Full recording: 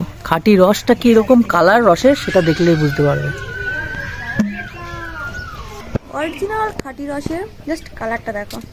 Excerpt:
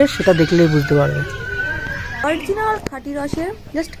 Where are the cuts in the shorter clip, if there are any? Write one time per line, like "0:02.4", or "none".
0:02.1